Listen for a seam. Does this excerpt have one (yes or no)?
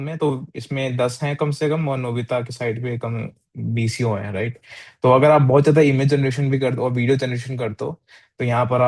no